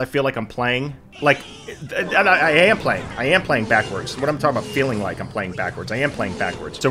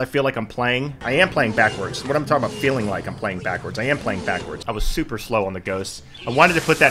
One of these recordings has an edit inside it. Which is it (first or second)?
second